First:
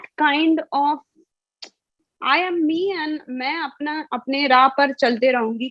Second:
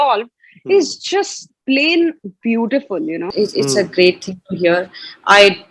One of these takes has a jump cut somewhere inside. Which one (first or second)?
second